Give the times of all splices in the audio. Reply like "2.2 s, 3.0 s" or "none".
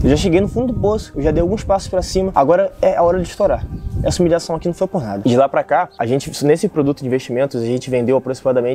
2.3 s, 5.2 s, 5.9 s